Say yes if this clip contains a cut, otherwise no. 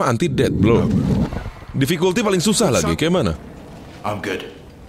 no